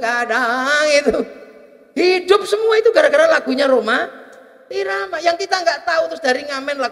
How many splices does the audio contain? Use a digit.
0